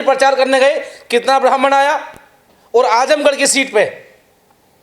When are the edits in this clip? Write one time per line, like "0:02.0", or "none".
none